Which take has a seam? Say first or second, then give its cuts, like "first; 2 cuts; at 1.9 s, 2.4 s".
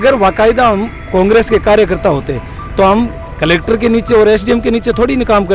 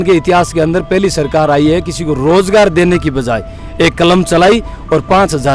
first; 1 cut; at 3.2 s